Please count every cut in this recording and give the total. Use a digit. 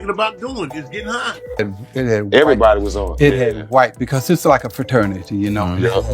1